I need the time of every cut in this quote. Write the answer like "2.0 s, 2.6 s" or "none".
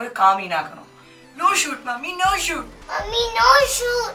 2.8 s